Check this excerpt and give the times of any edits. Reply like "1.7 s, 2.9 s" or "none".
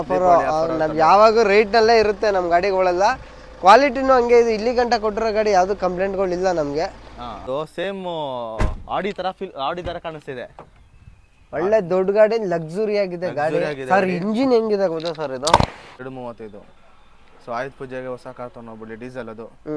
7.4 s, 16.0 s